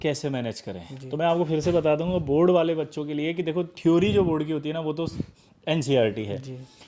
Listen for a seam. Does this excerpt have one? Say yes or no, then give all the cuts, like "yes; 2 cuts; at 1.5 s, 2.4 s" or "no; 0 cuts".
no; 0 cuts